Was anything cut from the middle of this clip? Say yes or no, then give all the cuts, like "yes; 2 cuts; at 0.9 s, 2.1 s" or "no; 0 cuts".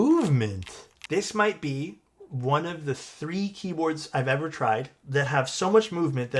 yes; 2 cuts; at 0.9 s, 5.0 s